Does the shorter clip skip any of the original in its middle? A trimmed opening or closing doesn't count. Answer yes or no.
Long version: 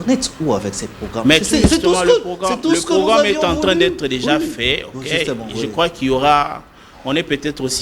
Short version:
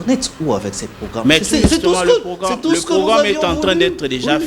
no